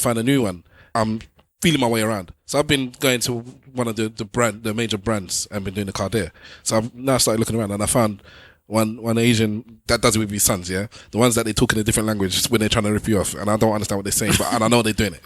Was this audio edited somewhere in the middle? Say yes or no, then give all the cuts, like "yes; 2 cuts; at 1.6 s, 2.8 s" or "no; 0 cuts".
yes; 3 cuts; at 0.8 s, 6.4 s, 9.8 s